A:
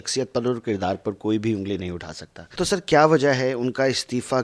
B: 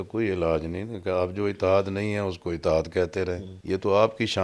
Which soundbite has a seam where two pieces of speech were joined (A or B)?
B